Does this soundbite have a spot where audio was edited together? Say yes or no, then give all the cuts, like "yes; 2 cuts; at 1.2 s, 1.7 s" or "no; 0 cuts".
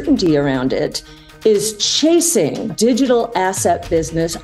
yes; 1 cut; at 2.7 s